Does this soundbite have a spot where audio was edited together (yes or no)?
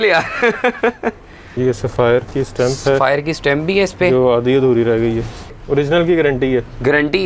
yes